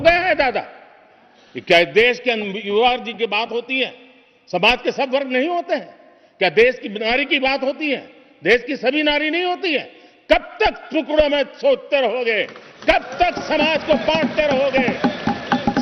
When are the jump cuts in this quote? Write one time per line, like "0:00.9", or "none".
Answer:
none